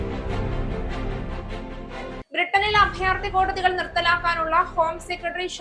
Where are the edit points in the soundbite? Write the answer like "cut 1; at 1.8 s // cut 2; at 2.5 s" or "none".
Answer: cut 1; at 2.2 s

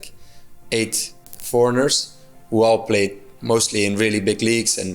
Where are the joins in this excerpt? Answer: cut 1; at 1.3 s

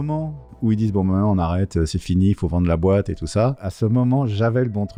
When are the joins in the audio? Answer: none

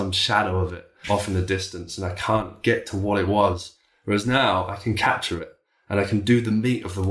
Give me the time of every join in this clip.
none

